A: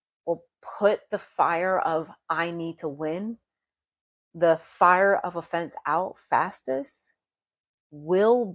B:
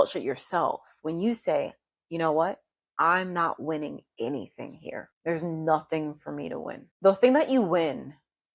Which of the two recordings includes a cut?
B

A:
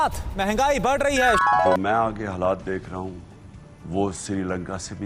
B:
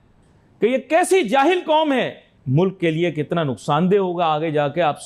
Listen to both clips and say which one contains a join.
A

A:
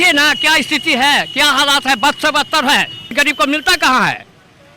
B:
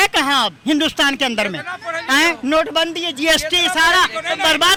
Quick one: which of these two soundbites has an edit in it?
A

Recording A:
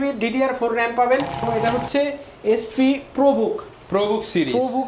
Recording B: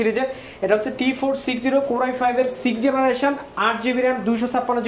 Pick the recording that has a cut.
A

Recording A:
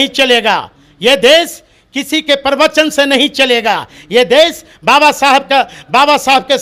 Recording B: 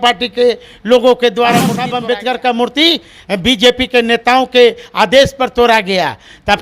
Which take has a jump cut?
B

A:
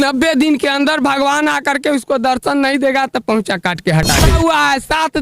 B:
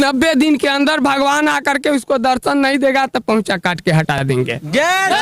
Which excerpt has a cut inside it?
A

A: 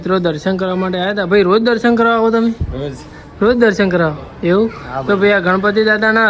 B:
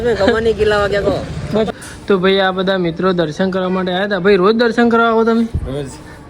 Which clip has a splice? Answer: B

